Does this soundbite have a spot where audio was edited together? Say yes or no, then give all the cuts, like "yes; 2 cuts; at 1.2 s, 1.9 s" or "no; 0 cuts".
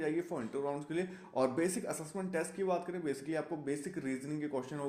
no; 0 cuts